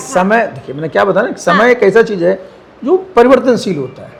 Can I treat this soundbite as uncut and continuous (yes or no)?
yes